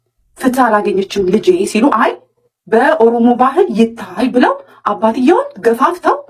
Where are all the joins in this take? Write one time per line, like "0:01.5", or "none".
none